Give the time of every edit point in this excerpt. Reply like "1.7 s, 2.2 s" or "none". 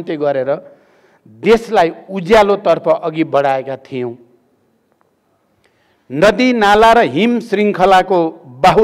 none